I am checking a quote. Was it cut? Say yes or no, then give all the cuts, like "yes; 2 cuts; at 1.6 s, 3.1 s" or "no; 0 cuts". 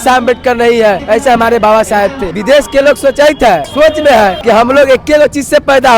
yes; 4 cuts; at 1.0 s, 2.3 s, 3.7 s, 4.4 s